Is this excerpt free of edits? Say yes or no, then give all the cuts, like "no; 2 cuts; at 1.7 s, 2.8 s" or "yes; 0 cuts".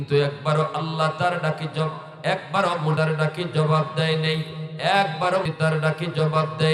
no; 2 cuts; at 3.0 s, 5.5 s